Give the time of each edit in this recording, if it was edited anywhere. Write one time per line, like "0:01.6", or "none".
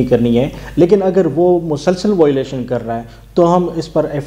none

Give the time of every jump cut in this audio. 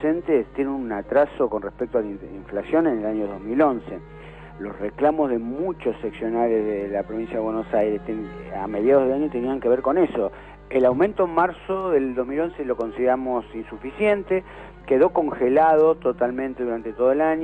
0:06.1

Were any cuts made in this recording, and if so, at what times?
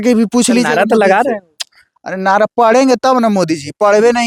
none

